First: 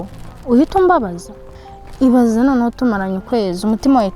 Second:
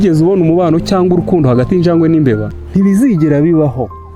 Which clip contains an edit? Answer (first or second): second